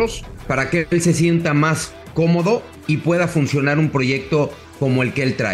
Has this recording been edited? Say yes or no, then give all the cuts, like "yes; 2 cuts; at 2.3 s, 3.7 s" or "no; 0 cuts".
yes; 2 cuts; at 2.7 s, 4.6 s